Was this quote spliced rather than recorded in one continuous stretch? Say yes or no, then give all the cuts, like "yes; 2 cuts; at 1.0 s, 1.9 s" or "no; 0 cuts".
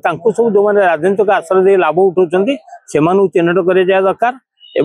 no; 0 cuts